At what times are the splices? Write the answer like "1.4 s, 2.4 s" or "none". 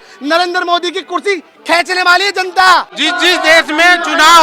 3.0 s